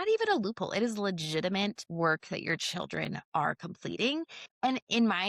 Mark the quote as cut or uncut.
cut